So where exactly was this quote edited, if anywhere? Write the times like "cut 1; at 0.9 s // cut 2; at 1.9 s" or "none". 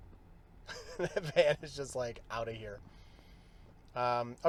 none